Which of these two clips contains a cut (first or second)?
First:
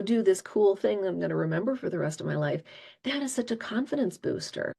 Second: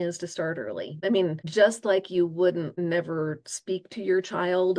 second